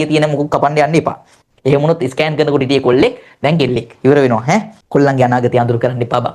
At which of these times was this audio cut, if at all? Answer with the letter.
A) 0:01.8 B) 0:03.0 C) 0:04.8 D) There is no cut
C